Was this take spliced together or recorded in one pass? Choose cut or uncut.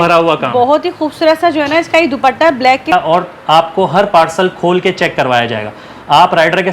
cut